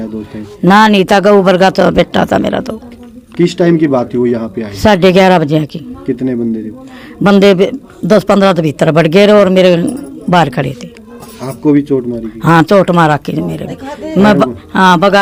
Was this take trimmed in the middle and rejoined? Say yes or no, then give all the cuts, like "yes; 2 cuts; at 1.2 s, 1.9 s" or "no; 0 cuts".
no; 0 cuts